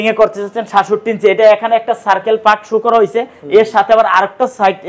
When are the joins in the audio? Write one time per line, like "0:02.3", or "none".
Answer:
none